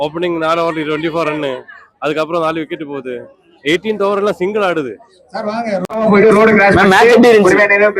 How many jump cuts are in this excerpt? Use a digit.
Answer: 1